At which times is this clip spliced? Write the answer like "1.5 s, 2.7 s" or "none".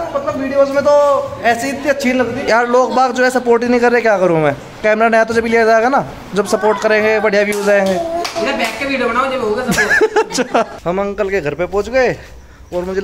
2.4 s, 10.8 s